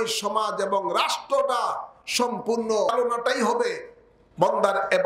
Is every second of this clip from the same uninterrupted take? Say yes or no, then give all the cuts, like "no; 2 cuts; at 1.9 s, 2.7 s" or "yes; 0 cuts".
no; 1 cut; at 2.9 s